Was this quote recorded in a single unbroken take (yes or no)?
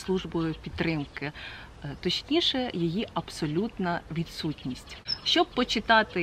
yes